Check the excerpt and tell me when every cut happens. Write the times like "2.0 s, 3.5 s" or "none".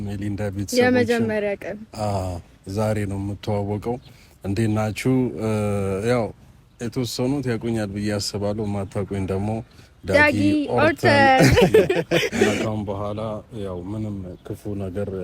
12.6 s